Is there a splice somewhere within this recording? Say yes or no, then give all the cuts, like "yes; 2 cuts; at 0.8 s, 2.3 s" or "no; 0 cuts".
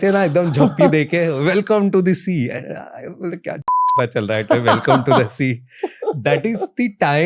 no; 0 cuts